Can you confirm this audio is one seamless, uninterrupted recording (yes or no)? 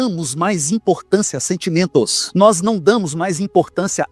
no